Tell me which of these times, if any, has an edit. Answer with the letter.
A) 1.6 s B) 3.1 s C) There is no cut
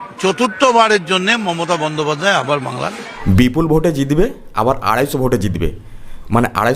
B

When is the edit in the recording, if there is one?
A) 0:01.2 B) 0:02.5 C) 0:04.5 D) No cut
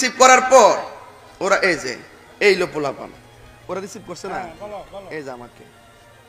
D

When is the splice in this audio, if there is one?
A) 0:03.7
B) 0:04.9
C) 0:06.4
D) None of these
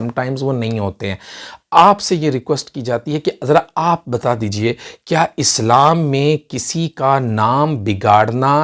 D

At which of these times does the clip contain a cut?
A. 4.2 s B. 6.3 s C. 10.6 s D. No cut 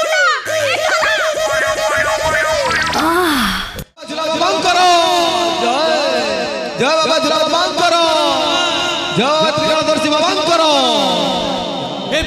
A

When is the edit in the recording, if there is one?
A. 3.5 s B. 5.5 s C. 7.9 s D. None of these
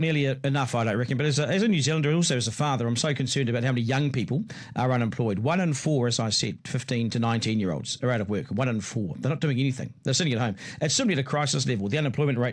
C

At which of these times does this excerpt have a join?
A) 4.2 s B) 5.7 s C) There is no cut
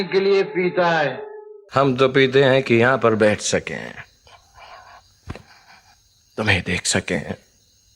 C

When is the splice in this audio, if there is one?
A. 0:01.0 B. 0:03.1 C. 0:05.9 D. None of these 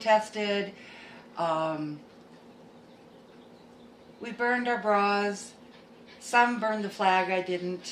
B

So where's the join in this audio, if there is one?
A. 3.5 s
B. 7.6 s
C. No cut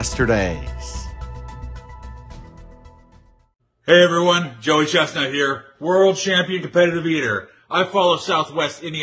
A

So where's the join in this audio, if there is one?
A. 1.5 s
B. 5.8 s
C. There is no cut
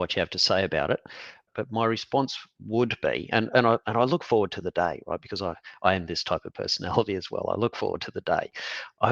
A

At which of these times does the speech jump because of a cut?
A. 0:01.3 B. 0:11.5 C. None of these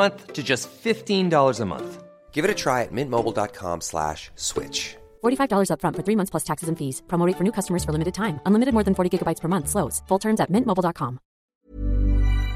B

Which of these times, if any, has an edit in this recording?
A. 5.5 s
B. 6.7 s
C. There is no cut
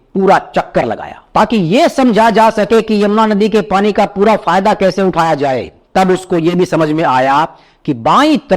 C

